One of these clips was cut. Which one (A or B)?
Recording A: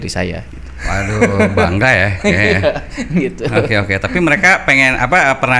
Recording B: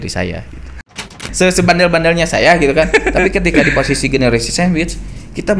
B